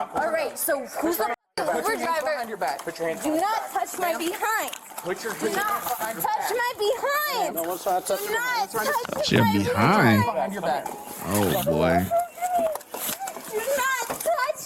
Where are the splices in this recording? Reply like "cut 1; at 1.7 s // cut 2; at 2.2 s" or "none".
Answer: cut 1; at 11.0 s

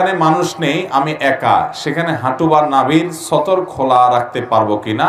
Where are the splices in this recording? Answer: none

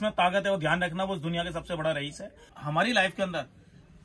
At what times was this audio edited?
cut 1; at 2.4 s

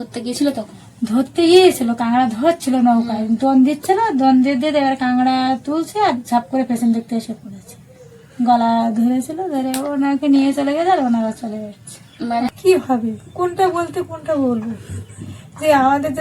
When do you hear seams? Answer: cut 1; at 12.5 s

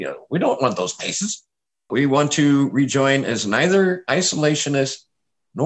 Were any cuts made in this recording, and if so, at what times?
cut 1; at 1.9 s

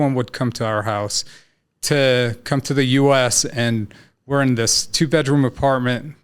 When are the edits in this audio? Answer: none

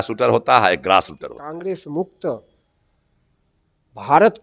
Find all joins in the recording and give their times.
cut 1; at 1.5 s

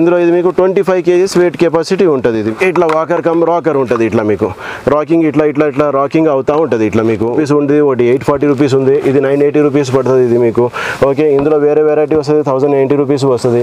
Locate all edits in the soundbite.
cut 1; at 2.5 s // cut 2; at 7.4 s

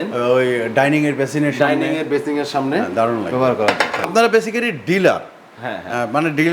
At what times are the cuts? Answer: cut 1; at 4.1 s

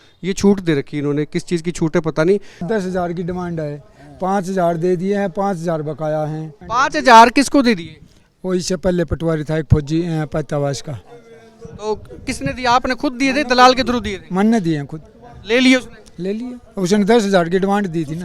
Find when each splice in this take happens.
cut 1; at 2.6 s // cut 2; at 6.6 s

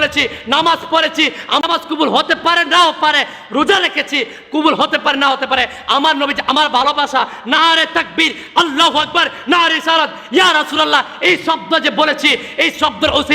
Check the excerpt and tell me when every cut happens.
cut 1; at 1.6 s

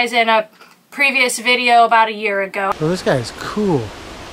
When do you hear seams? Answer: cut 1; at 2.7 s

